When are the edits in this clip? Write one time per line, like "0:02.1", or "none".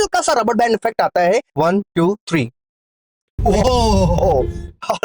0:01.5